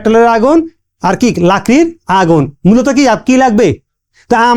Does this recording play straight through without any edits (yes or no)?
yes